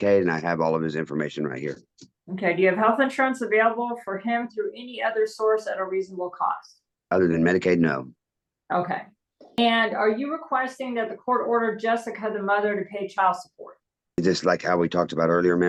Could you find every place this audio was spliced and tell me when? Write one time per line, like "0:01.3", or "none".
none